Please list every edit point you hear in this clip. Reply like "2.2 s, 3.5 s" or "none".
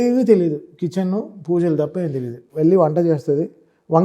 none